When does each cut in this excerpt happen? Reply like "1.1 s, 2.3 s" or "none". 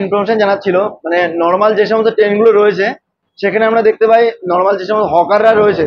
none